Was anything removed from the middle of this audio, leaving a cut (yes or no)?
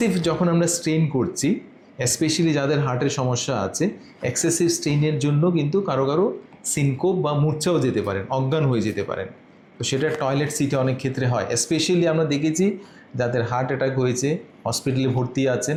no